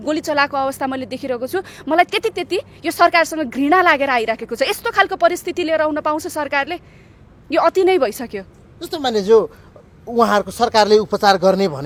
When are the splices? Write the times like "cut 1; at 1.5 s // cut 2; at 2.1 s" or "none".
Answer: none